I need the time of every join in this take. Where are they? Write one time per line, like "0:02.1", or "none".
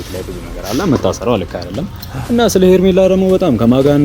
none